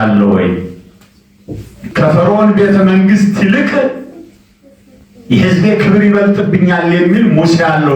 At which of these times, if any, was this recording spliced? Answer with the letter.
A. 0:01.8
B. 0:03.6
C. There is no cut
A